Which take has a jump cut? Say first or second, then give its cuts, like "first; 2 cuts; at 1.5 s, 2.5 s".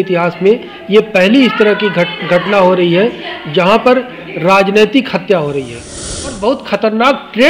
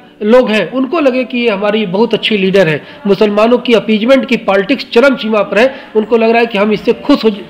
first; 1 cut; at 6.3 s